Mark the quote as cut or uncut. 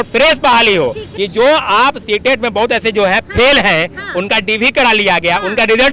cut